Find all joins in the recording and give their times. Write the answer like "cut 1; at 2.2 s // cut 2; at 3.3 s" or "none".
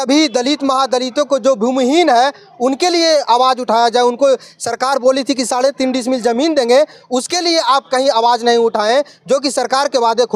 none